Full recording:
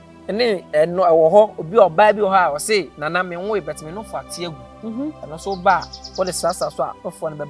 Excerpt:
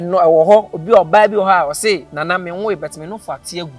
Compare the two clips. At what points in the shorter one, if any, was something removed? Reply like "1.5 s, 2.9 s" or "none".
none

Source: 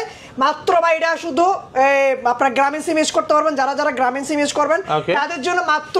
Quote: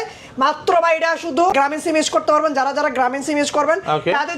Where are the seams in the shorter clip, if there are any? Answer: 1.5 s

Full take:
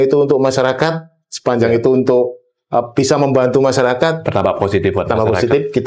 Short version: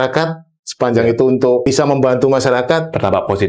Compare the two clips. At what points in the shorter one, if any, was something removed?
1.6 s

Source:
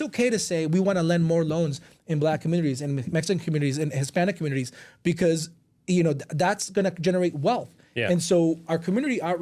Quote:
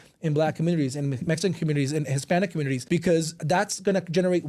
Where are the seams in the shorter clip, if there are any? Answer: 2.8 s, 3.4 s

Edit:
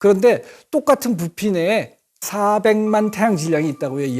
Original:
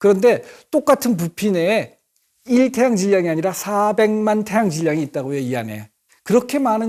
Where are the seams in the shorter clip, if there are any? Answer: 2.3 s

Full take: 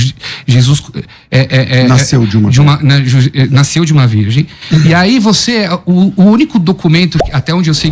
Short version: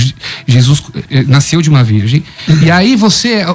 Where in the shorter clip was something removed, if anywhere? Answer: 1.1 s

